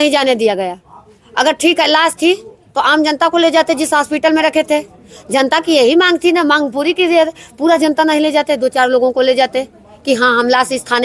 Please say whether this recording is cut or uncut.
uncut